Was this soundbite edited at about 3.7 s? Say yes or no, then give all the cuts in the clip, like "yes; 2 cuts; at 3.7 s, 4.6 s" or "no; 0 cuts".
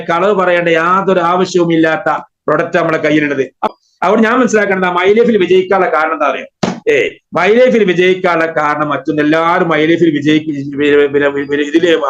yes; 1 cut; at 3.7 s